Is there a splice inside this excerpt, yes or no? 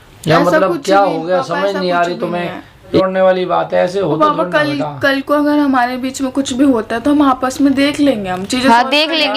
yes